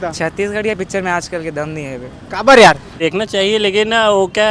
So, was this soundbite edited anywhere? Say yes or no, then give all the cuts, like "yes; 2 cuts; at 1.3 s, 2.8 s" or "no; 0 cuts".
yes; 1 cut; at 2.9 s